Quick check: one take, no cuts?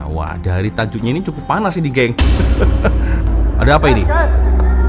no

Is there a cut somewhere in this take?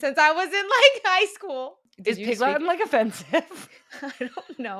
yes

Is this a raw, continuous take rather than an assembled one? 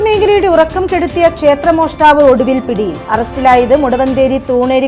yes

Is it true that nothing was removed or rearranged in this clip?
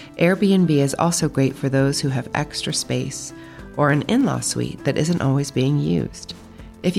yes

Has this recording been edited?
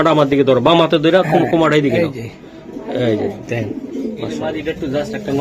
yes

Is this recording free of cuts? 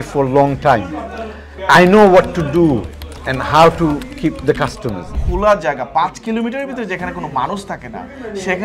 no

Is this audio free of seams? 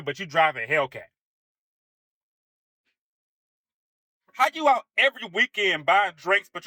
yes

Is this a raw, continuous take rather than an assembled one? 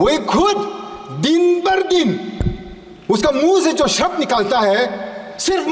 yes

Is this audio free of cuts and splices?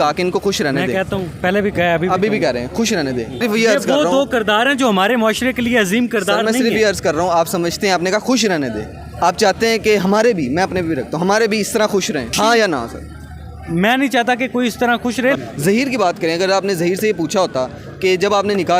no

